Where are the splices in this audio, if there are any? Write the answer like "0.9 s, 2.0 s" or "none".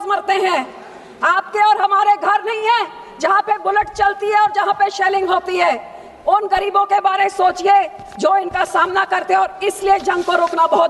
none